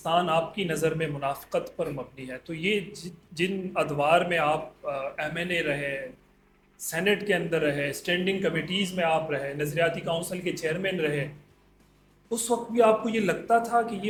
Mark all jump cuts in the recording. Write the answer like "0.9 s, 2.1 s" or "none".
none

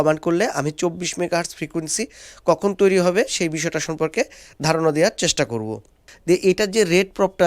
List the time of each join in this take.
6.0 s

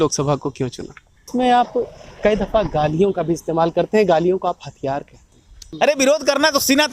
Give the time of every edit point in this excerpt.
1.3 s, 5.6 s

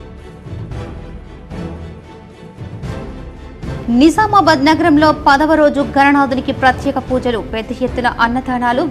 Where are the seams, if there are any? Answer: 0.9 s

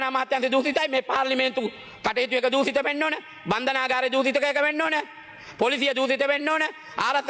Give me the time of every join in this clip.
none

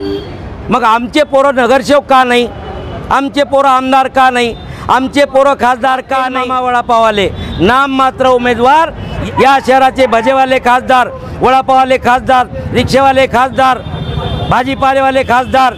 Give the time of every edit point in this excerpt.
6.3 s, 9.1 s

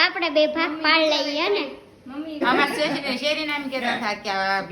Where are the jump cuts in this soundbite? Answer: 2.4 s

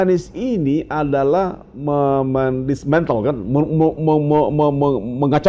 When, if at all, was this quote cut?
none

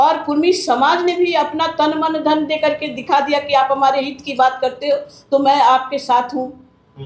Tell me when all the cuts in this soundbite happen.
none

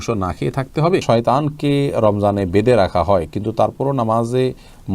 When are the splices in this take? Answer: 1.0 s

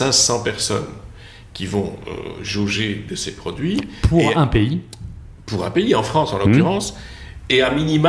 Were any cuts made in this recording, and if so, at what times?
none

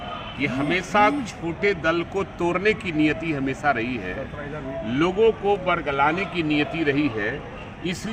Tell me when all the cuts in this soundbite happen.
none

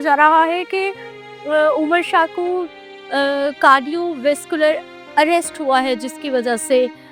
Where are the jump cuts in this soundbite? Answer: none

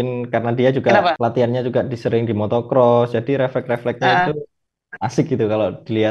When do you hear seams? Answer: 1.2 s

